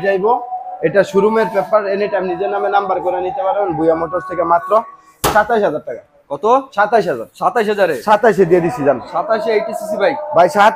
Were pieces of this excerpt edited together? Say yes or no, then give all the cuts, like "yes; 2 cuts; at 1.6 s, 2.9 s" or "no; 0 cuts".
no; 0 cuts